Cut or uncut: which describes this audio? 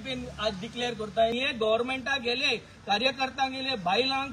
cut